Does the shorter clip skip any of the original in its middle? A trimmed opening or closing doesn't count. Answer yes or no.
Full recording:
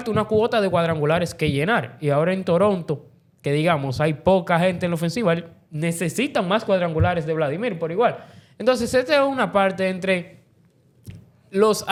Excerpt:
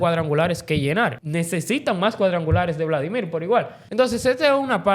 yes